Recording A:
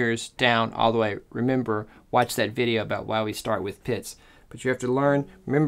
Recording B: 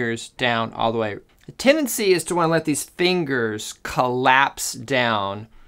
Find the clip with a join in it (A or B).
B